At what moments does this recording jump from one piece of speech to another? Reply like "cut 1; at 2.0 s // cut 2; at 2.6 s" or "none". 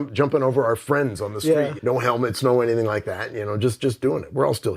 cut 1; at 1.7 s